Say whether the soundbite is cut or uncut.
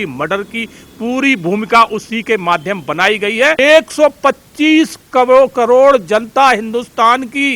cut